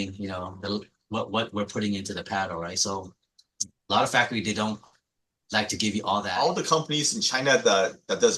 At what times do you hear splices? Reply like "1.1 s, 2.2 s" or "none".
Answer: 6.3 s

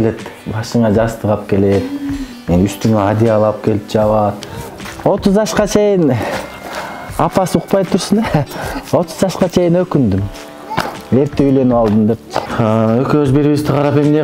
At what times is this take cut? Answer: 4.4 s, 12.4 s

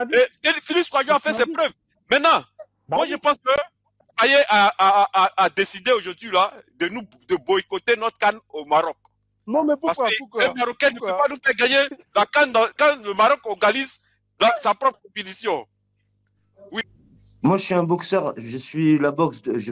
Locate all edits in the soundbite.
16.7 s

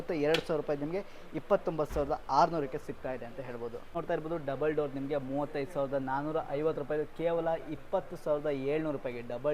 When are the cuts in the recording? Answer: 3.9 s

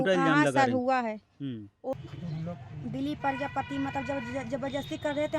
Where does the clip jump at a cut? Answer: 1.9 s

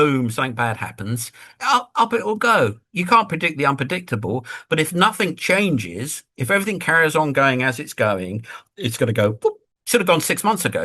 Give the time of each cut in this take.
9.7 s

